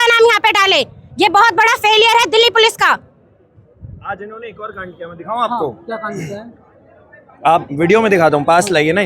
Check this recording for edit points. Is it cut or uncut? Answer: uncut